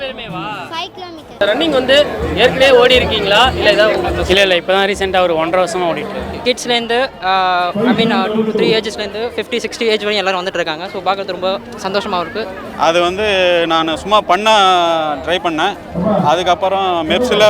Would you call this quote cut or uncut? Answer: cut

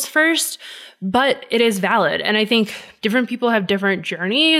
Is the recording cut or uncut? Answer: cut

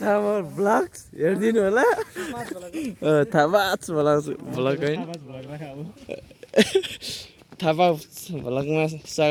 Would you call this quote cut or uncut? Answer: uncut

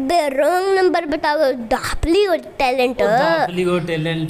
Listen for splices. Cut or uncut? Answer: uncut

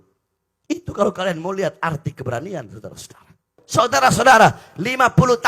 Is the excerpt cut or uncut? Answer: cut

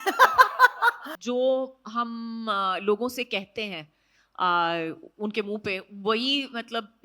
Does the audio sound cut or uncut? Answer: cut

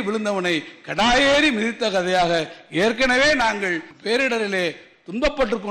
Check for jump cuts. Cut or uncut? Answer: cut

